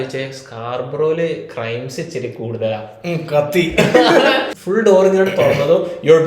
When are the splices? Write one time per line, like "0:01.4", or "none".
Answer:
0:04.5

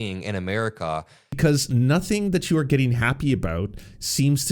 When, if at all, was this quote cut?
0:01.4

